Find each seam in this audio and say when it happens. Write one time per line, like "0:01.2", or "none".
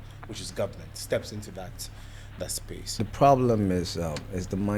0:03.0